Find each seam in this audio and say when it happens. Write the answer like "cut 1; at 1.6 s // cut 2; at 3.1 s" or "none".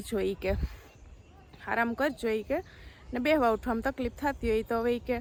none